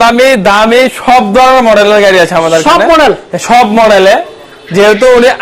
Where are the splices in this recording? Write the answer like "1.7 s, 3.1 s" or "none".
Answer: none